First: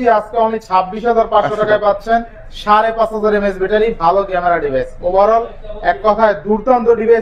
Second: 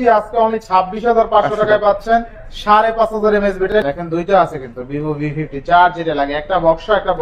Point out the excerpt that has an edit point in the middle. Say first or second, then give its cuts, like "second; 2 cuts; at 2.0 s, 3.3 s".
second; 1 cut; at 3.7 s